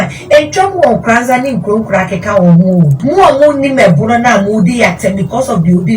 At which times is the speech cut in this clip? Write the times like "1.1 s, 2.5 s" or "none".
3.0 s